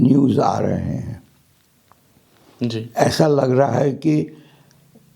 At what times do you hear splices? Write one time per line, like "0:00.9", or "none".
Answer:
none